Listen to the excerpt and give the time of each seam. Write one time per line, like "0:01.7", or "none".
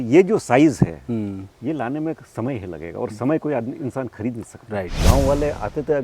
0:05.0